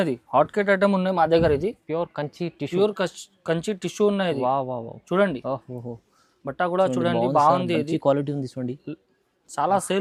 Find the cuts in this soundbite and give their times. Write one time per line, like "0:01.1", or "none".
none